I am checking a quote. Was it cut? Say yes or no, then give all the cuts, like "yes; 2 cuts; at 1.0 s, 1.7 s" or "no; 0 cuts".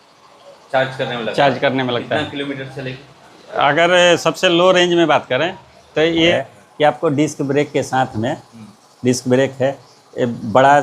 yes; 1 cut; at 6.3 s